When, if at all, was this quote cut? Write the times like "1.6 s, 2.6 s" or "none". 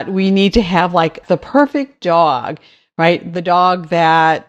1.2 s